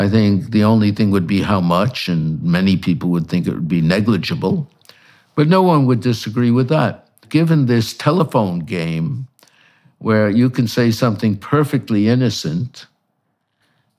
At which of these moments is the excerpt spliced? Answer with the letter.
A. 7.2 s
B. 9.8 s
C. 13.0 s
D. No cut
A